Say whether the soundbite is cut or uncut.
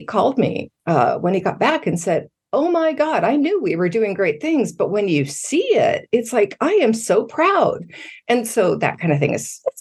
uncut